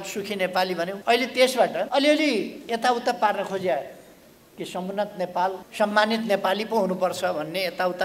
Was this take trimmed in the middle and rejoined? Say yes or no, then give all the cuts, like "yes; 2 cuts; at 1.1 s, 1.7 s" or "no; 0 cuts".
yes; 3 cuts; at 0.9 s, 1.9 s, 5.6 s